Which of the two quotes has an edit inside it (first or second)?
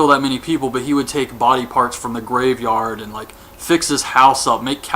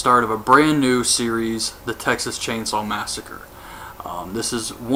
first